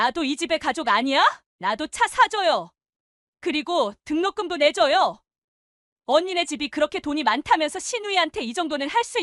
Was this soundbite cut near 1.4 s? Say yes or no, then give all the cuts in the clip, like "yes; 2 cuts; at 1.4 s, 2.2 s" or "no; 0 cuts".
yes; 1 cut; at 1.4 s